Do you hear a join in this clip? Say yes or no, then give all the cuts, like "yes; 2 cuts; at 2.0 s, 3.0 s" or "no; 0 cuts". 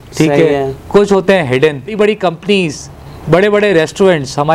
yes; 1 cut; at 1.9 s